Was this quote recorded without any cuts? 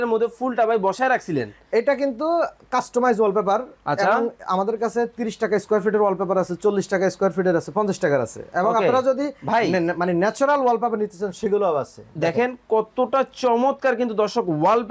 yes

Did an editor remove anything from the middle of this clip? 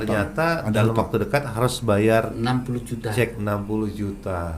no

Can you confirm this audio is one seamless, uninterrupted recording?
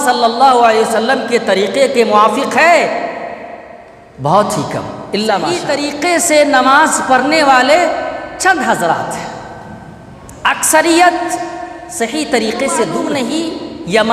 no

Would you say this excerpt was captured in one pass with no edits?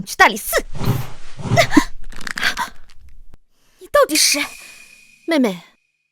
no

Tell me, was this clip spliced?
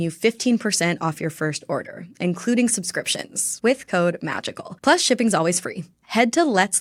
no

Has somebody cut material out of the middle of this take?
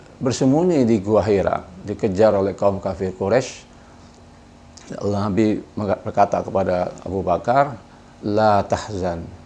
no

